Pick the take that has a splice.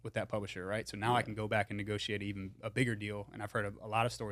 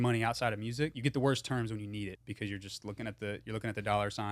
second; 2 cuts; at 1.0 s, 2.2 s

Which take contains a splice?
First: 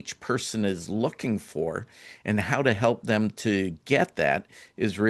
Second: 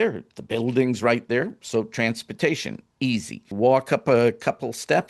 second; 1 cut; at 3.4 s

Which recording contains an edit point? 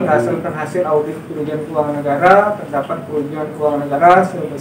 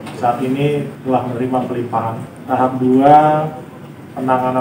second; 2 cuts; at 0.9 s, 2.3 s

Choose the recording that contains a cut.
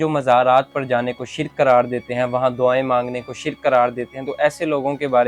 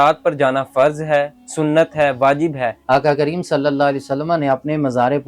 second; 1 cut; at 2.7 s

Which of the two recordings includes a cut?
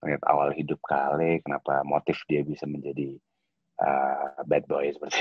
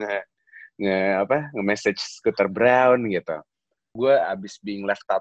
second; 1 cut; at 3.9 s

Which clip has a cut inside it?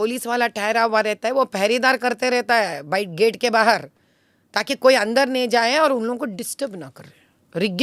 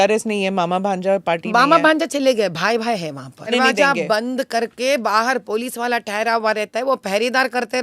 second; 1 cut; at 3.5 s

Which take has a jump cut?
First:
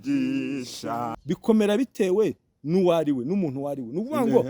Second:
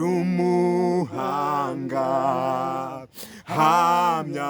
first; 1 cut; at 1.1 s

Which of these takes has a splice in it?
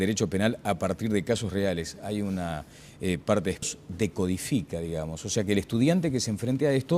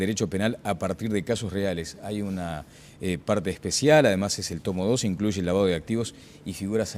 second; 1 cut; at 3.6 s

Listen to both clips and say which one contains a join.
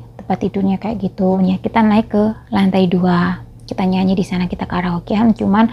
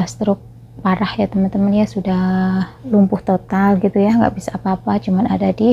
first; 1 cut; at 1.4 s

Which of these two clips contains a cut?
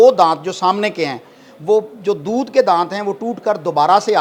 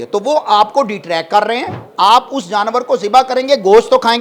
second; 1 cut; at 1.8 s

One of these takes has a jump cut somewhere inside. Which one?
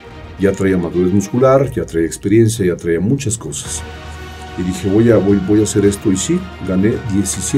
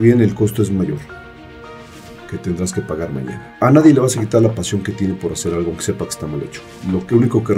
second; 2 cuts; at 3.4 s, 6.7 s

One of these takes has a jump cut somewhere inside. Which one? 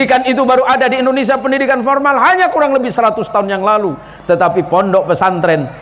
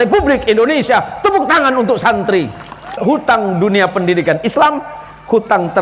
second; 1 cut; at 3.0 s

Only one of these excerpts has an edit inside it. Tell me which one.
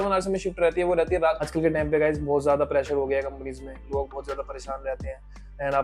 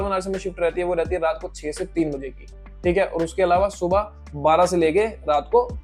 first; 1 cut; at 1.5 s

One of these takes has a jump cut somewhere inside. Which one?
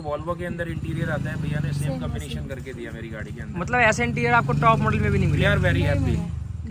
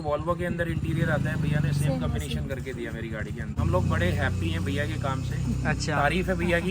second; 1 cut; at 3.5 s

